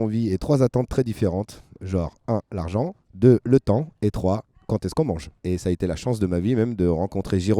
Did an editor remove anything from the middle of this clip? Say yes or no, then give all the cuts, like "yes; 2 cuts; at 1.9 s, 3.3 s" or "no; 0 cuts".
yes; 1 cut; at 5.3 s